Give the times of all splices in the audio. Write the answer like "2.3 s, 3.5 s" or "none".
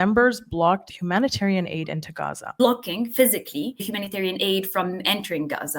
0.9 s, 2.4 s, 3.9 s